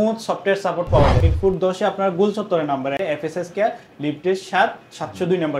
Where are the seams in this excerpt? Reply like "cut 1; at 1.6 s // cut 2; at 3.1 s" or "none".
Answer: cut 1; at 1.2 s // cut 2; at 3.0 s